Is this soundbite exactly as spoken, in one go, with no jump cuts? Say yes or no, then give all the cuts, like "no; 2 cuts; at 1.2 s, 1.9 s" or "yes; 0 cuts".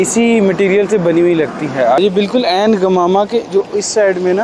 no; 1 cut; at 2.0 s